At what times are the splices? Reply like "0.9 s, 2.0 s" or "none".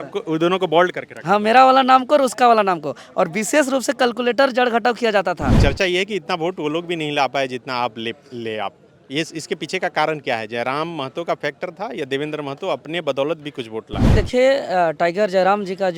5.5 s, 14.1 s